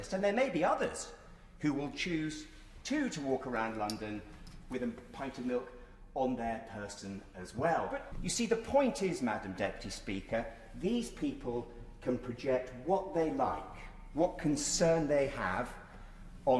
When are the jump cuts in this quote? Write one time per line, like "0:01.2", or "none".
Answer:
0:08.1